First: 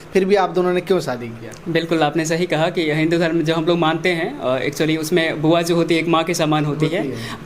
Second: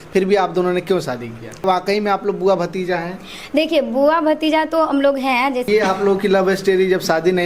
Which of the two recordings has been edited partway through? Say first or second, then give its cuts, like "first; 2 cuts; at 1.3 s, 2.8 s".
second; 2 cuts; at 1.6 s, 5.6 s